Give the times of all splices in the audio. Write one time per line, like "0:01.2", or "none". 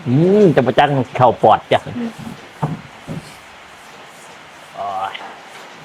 none